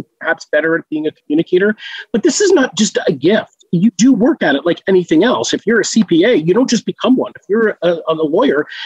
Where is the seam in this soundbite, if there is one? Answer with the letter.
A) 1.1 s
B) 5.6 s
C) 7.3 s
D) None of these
D